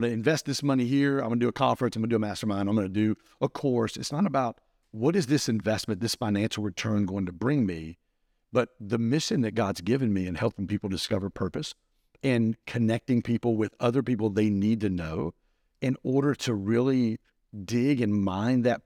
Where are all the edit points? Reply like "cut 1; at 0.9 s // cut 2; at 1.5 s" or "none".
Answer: none